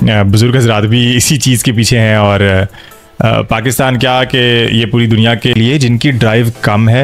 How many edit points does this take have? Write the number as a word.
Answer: one